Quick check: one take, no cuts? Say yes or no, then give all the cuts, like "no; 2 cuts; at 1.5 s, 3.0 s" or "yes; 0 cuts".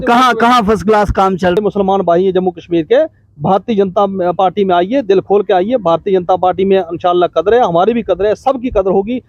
no; 1 cut; at 1.6 s